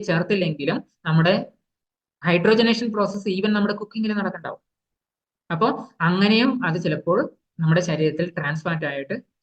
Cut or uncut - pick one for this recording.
uncut